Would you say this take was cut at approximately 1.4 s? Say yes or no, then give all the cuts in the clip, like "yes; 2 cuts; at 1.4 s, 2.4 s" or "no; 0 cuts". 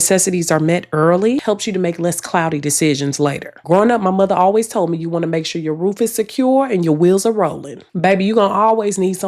yes; 1 cut; at 1.4 s